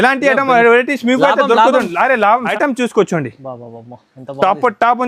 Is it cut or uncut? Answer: cut